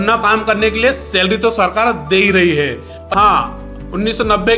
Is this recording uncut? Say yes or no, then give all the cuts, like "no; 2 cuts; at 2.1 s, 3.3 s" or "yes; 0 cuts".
no; 1 cut; at 3.0 s